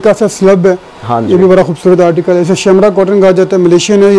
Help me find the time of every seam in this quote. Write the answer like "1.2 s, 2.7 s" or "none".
none